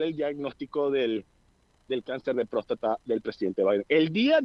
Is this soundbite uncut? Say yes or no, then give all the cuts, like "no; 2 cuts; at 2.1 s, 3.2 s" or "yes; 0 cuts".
yes; 0 cuts